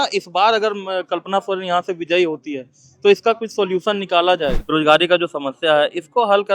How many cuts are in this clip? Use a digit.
1